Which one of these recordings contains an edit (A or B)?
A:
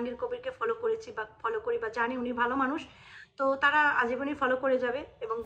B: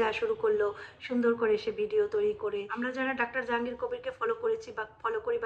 B